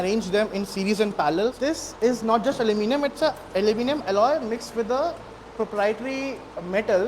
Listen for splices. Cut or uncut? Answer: cut